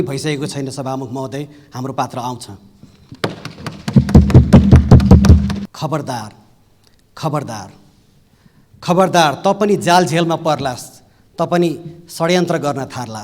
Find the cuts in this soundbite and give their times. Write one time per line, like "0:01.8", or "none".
0:05.7